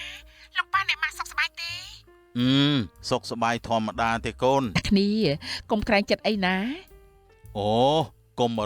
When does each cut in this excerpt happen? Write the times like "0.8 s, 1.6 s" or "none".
4.8 s

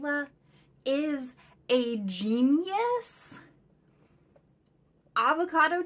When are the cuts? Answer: none

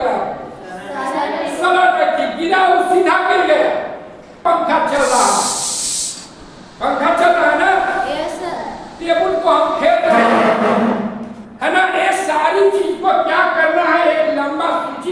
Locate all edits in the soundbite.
4.4 s

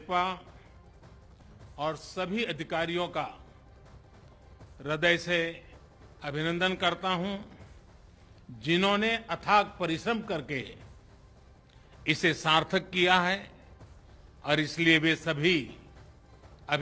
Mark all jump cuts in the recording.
3.4 s, 4.8 s

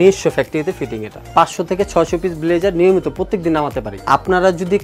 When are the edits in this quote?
1.3 s, 4.0 s

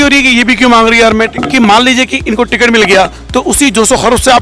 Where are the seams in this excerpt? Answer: 1.0 s

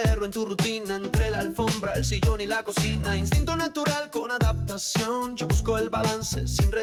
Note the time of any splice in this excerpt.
none

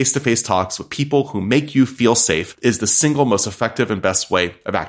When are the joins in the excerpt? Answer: 2.5 s

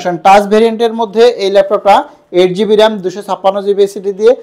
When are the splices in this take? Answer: none

